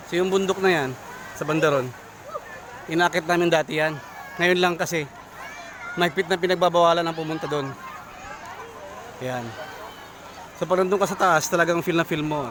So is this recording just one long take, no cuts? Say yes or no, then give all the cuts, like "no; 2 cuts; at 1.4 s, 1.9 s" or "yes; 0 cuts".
yes; 0 cuts